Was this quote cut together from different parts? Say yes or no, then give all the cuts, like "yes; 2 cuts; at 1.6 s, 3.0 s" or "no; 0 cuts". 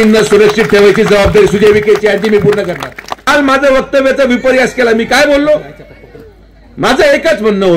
yes; 1 cut; at 3.3 s